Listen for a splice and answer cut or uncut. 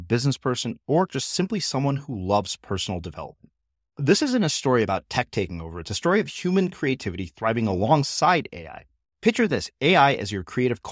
uncut